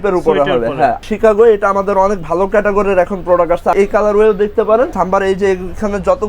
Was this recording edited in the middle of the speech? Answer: yes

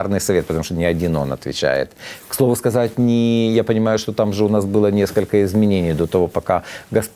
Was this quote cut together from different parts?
no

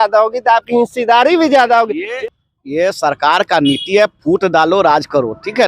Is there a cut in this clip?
yes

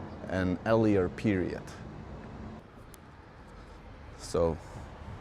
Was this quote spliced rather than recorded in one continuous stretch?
yes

